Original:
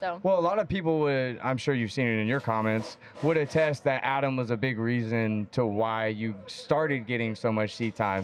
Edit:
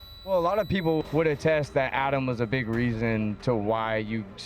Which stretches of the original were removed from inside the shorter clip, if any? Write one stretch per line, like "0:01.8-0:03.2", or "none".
0:01.0-0:03.1